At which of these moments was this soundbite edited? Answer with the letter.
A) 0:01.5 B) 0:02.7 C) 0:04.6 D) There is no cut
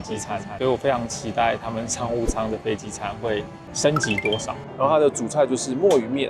C